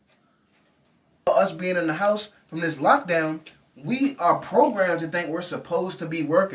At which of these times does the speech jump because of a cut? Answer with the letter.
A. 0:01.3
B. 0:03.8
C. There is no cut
A